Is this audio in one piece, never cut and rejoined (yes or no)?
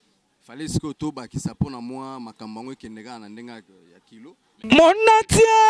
no